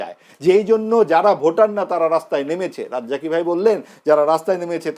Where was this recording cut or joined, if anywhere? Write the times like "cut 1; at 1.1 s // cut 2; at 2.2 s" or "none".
none